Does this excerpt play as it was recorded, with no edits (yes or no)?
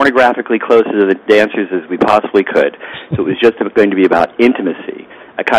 yes